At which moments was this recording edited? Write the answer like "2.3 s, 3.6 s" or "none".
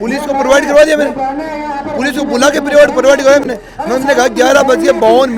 none

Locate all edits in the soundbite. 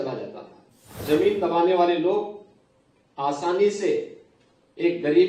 0.9 s

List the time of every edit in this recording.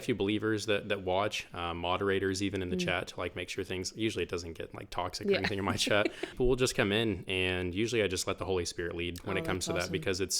6.4 s

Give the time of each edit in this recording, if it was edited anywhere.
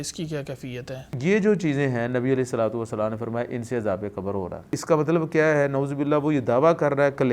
1.1 s, 4.7 s

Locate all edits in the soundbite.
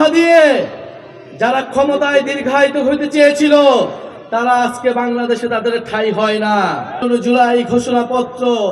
7.0 s

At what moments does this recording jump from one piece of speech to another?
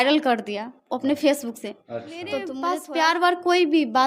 2.6 s

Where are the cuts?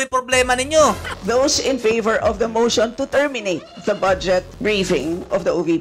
1.1 s

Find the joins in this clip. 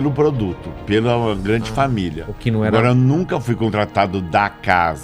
none

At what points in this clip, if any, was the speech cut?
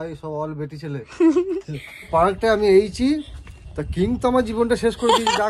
2.1 s

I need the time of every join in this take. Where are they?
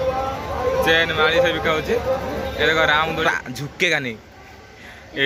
3.2 s

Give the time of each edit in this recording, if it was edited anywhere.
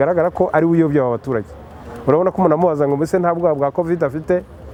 none

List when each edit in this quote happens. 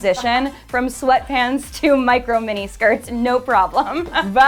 none

